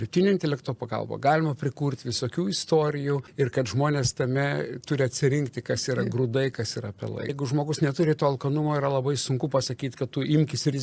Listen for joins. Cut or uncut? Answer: cut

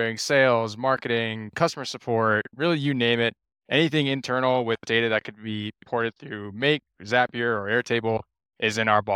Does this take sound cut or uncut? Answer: uncut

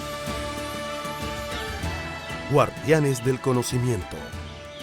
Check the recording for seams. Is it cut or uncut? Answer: cut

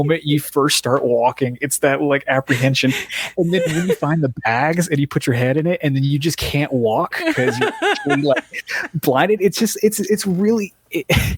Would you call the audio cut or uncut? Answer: uncut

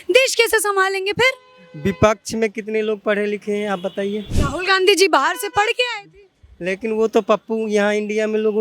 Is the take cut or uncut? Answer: cut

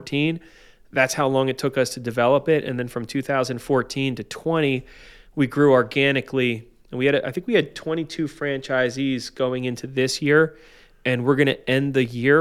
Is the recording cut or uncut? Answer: uncut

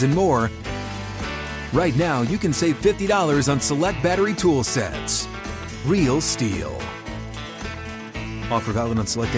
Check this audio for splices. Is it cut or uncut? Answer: uncut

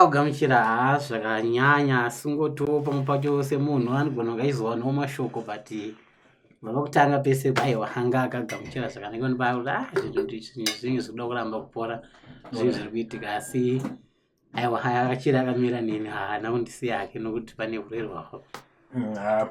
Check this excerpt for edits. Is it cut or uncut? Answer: uncut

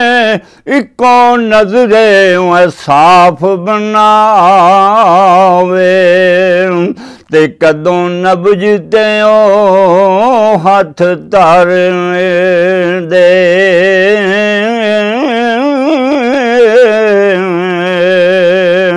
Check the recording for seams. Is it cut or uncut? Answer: uncut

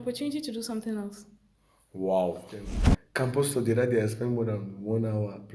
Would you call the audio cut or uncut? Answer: cut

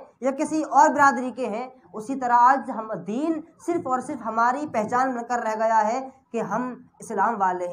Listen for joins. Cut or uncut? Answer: uncut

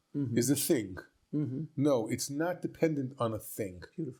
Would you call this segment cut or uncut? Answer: uncut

